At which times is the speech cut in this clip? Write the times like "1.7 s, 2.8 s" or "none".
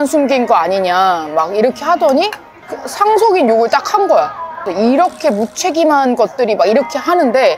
none